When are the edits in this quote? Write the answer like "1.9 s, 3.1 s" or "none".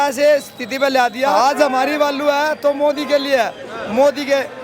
1.3 s

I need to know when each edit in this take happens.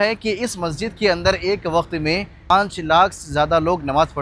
none

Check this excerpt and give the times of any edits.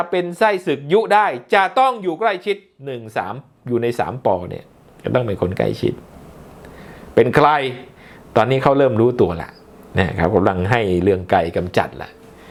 none

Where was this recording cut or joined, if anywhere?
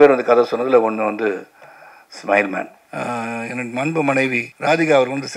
2.8 s, 4.5 s

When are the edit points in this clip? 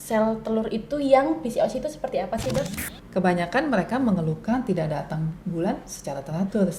2.7 s

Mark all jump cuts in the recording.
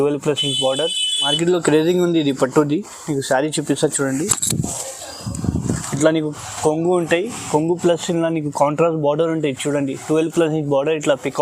1.3 s

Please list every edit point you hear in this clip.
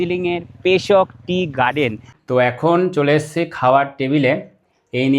2.1 s

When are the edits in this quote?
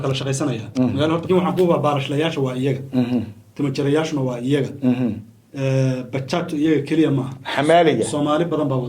1.2 s

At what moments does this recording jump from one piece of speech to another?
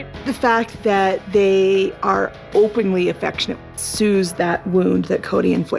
none

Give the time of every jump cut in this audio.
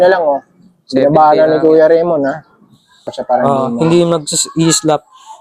3.2 s

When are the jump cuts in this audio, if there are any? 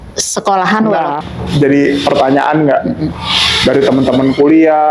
1.2 s

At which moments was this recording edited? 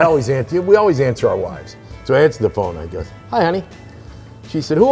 none

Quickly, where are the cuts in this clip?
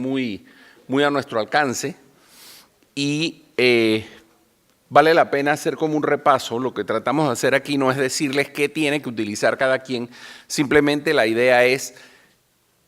6.5 s

